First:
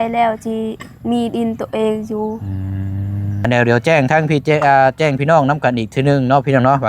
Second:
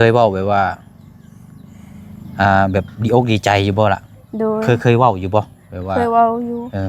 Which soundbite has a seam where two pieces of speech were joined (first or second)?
first